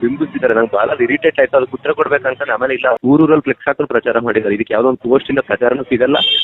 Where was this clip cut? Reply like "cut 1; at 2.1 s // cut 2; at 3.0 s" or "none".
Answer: cut 1; at 3.0 s